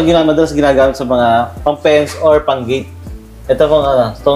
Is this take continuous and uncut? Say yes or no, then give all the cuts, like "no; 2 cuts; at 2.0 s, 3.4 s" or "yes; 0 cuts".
yes; 0 cuts